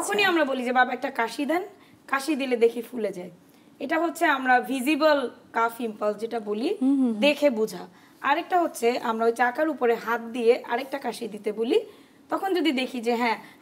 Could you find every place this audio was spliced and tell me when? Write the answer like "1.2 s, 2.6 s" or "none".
none